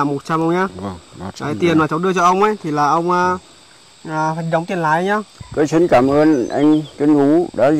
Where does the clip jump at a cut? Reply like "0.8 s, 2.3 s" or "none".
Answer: 5.3 s